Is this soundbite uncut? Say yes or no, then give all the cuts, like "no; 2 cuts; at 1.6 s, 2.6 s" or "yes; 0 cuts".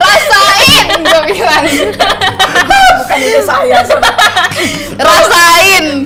yes; 0 cuts